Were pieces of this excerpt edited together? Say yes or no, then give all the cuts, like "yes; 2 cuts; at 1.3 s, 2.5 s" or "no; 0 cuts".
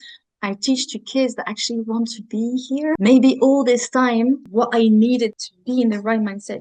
yes; 3 cuts; at 2.9 s, 4.4 s, 5.5 s